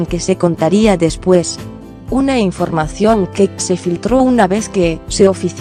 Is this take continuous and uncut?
yes; 0 cuts

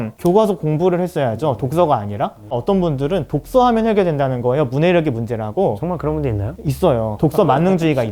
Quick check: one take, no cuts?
no; 2 cuts; at 2.6 s, 7.1 s

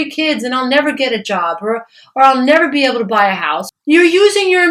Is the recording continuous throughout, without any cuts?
yes; 0 cuts

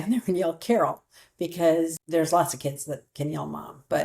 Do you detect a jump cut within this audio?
yes; 1 cut; at 2.0 s

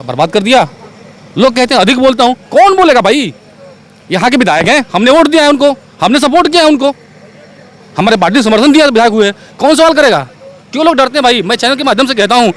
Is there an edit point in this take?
no; 0 cuts

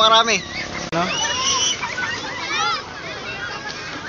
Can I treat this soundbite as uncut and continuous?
no; 1 cut; at 0.9 s

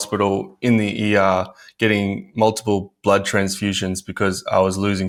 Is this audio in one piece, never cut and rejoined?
yes; 0 cuts

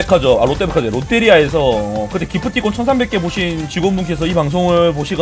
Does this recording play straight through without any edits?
yes; 0 cuts

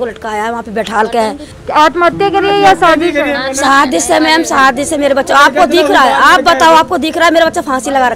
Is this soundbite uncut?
no; 1 cut; at 1.5 s

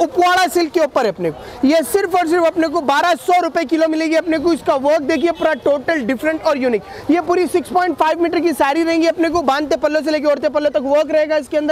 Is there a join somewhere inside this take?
no; 0 cuts

